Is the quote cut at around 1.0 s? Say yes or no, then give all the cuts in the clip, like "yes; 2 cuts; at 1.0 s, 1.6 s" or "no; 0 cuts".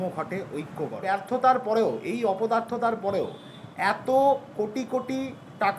yes; 1 cut; at 1.0 s